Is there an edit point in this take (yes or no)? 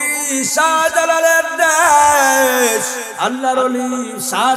yes